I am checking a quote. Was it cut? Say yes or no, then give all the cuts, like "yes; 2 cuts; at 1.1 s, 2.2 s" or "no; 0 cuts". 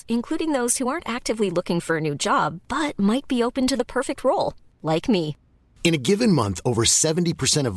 no; 0 cuts